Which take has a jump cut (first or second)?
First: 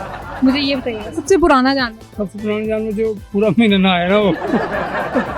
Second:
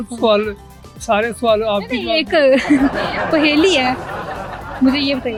first